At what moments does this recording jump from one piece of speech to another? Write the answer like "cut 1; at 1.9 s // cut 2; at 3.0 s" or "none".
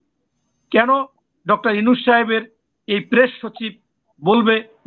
none